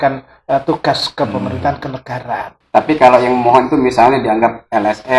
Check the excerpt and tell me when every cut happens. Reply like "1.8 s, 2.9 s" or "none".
2.5 s